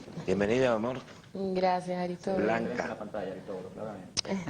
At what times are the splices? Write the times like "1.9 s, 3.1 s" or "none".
3.4 s